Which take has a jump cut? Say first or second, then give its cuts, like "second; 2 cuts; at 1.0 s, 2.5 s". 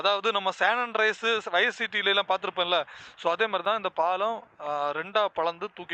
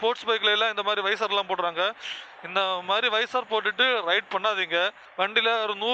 second; 1 cut; at 5.0 s